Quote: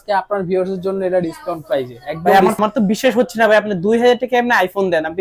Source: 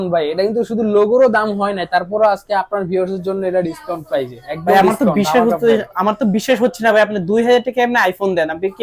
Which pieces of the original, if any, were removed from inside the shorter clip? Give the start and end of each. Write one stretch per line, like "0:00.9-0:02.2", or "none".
0:05.0-0:06.0

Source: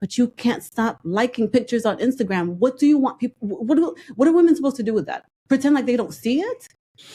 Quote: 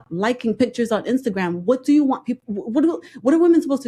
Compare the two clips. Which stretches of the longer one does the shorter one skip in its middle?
none

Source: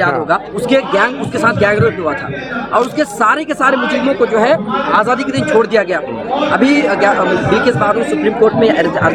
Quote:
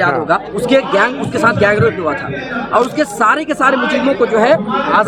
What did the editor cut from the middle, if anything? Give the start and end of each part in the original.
none

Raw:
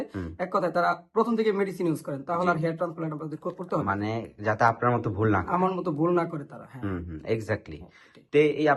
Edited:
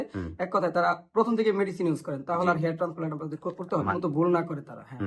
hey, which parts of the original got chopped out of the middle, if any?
0:03.9-0:05.8

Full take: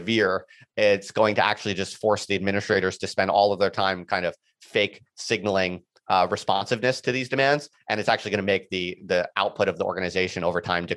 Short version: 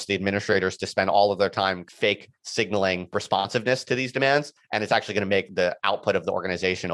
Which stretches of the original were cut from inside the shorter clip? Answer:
0:04.0-0:04.5
0:05.9-0:06.3
0:08.7-0:09.0

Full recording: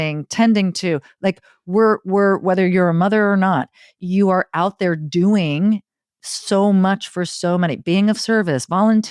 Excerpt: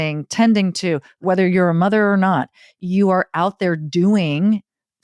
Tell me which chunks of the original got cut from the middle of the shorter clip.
0:01.2-0:02.4

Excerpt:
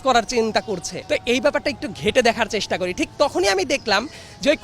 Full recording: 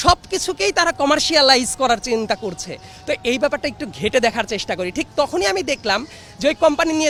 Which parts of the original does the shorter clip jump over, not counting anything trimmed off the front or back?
0:02.7-0:02.9

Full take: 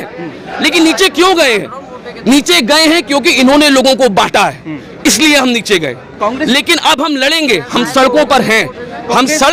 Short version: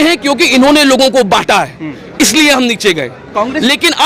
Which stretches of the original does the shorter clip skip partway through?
none

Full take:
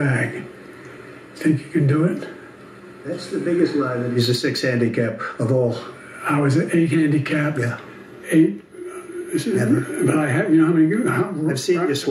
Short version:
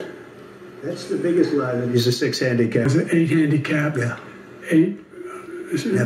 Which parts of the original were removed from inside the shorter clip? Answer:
0:05.1-0:06.5

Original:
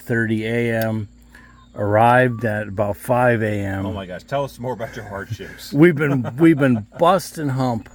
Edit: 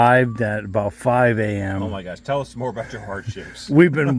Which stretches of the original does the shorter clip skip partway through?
none

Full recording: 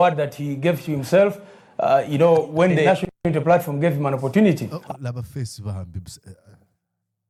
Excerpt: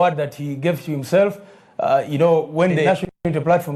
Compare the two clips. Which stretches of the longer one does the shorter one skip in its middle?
none

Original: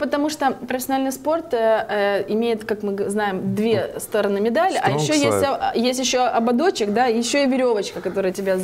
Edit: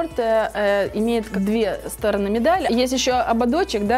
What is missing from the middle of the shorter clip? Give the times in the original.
0:02.6-0:03.4
0:04.8-0:05.7

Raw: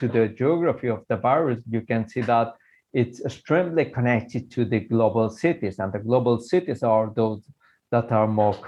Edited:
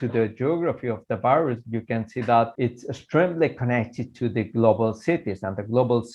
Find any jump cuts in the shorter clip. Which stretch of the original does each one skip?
0:02.5-0:02.9

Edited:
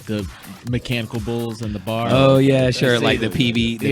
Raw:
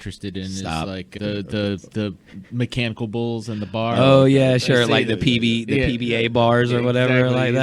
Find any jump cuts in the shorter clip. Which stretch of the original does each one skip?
none

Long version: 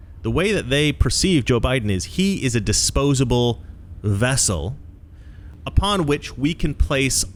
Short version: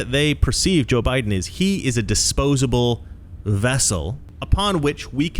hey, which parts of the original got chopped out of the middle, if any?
0:04.9-0:05.5

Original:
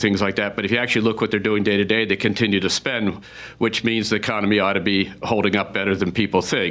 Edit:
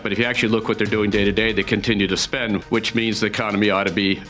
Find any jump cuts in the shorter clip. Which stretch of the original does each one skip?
0:03.2-0:03.5

